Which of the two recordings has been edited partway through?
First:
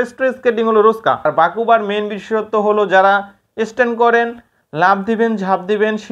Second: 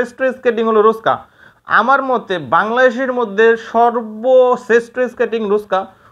first; 1 cut; at 1.2 s

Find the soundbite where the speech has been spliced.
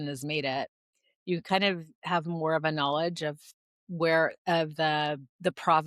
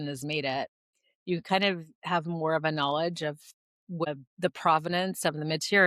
second; 1 cut; at 4.0 s

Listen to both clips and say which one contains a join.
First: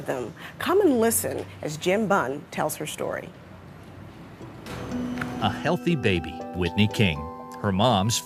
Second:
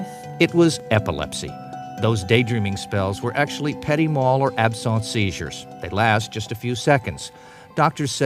second; 1 cut; at 4.5 s

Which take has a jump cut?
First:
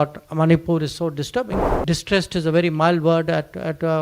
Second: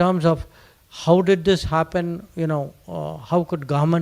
first; 1 cut; at 1.6 s

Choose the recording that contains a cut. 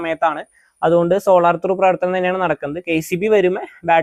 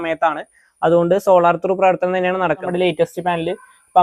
second; 1 cut; at 2.7 s

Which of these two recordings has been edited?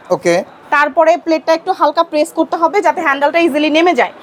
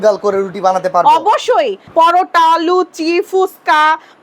second; 1 cut; at 1.8 s

